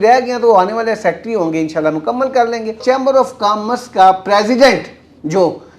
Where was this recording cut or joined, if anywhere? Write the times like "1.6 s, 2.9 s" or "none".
2.8 s